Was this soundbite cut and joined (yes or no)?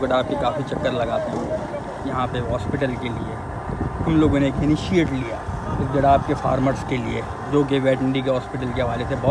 no